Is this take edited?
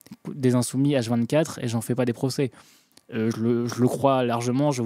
no; 0 cuts

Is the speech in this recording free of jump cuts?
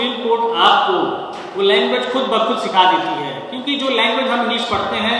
yes; 0 cuts

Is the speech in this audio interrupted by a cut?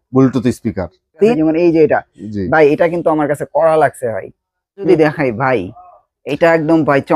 yes; 2 cuts; at 1.3 s, 4.8 s

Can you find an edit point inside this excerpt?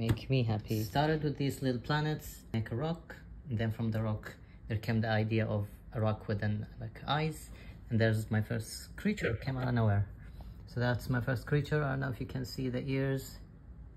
yes; 2 cuts; at 0.9 s, 2.5 s

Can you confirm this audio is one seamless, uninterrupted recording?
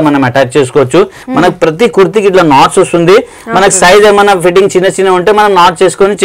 no; 1 cut; at 1.2 s

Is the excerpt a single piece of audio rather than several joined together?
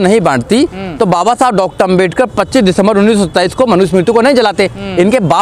yes; 0 cuts

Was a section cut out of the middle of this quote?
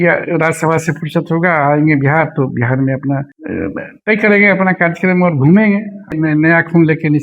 yes; 2 cuts; at 3.4 s, 6.1 s

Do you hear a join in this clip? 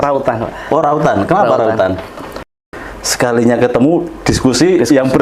yes; 1 cut; at 2.4 s

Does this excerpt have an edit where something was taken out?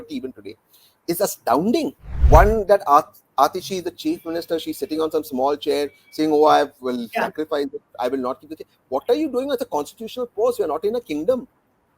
yes; 1 cut; at 2.1 s

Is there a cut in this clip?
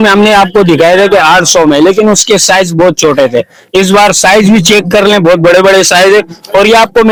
no; 0 cuts

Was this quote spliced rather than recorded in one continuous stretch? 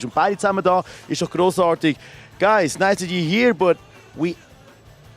yes; 1 cut; at 3.5 s

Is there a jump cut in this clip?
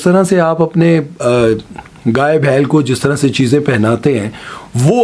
no; 0 cuts

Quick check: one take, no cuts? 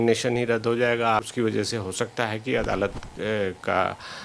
no; 1 cut; at 1.3 s

